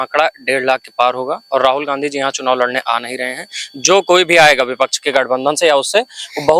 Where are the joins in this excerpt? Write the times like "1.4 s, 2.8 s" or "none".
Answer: none